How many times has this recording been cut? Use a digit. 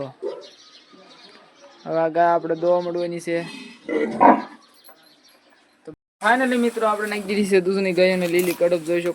1